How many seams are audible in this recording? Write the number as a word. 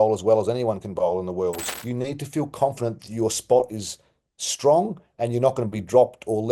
one